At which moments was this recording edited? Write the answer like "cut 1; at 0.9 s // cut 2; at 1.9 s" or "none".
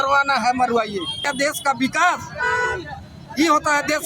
cut 1; at 1.3 s